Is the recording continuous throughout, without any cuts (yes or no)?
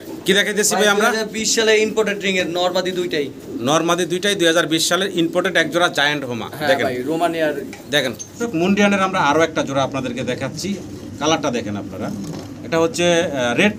no